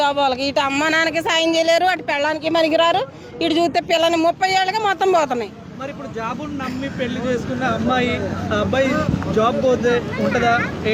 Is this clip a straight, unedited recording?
yes; 0 cuts

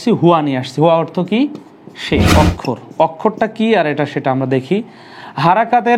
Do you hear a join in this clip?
yes; 1 cut; at 2.3 s

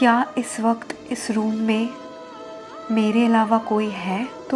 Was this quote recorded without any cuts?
yes; 0 cuts

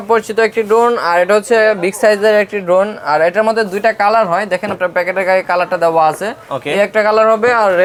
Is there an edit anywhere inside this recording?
no; 0 cuts

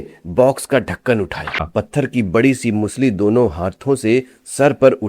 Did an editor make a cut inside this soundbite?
yes; 1 cut; at 1.6 s

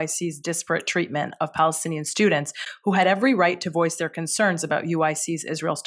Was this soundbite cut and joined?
no; 0 cuts

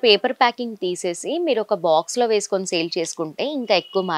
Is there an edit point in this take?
no; 0 cuts

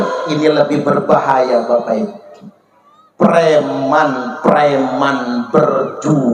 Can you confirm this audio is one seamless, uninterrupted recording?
yes; 0 cuts

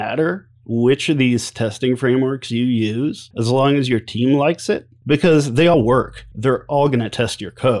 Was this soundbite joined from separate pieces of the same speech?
yes; 3 cuts; at 3.3 s, 4.9 s, 5.7 s

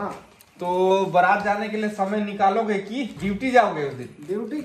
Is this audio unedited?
no; 1 cut; at 3.1 s

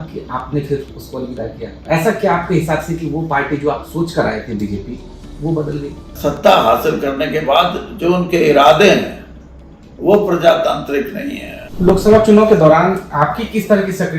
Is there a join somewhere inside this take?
yes; 2 cuts; at 6.3 s, 11.9 s

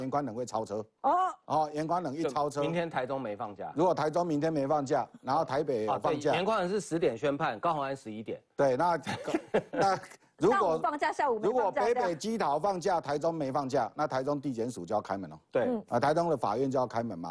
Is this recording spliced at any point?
no; 0 cuts

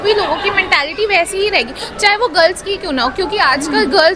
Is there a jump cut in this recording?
no; 0 cuts

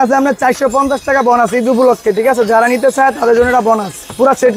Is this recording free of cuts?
yes; 0 cuts

